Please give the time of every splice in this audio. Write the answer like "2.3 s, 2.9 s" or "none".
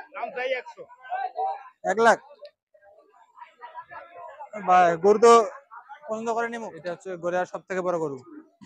6.6 s